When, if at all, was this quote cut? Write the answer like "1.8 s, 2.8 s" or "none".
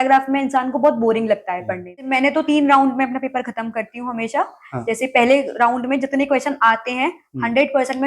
2.0 s